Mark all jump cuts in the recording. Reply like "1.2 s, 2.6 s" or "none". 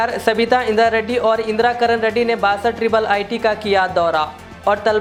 none